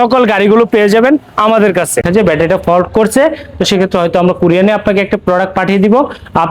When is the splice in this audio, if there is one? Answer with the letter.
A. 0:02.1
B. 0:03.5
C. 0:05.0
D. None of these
A